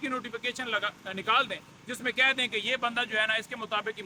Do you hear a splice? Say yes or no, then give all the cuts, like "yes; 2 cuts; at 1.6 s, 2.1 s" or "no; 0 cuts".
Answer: no; 0 cuts